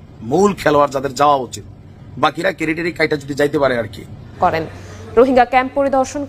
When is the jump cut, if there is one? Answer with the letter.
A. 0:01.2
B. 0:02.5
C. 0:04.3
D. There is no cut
C